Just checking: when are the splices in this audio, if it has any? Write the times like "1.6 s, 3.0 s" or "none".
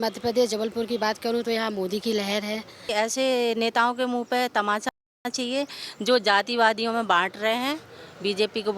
2.9 s